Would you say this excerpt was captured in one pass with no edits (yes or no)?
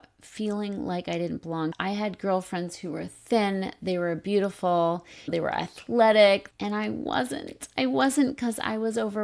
no